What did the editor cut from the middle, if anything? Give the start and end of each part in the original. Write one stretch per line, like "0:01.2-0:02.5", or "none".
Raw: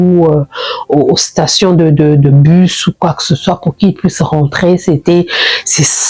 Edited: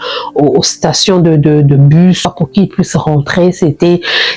0:02.8-0:03.5